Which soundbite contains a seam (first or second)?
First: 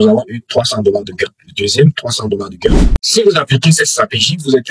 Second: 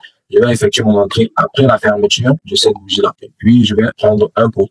first